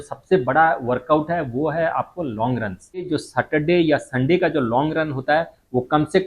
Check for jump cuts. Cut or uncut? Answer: cut